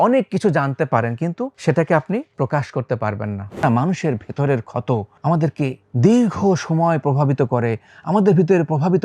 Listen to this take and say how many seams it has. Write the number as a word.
five